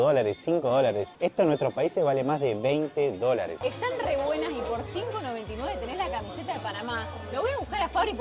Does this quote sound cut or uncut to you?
cut